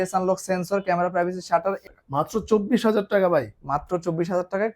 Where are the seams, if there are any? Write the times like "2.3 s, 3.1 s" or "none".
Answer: 1.8 s